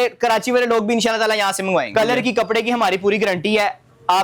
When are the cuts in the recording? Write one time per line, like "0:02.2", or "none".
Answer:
0:01.9